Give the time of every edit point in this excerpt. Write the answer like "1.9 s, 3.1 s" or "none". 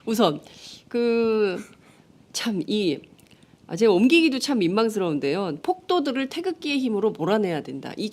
none